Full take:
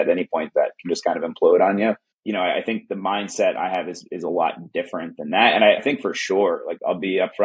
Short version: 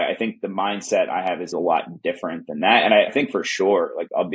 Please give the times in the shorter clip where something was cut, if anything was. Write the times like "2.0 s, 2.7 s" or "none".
1.5 s